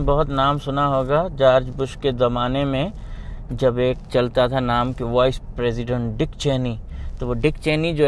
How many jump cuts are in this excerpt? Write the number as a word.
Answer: zero